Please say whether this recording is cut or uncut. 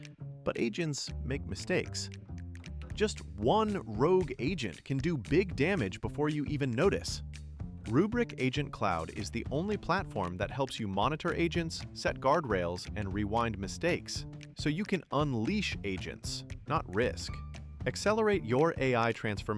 uncut